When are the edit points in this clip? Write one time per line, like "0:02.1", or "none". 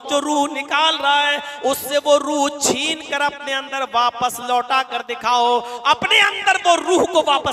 none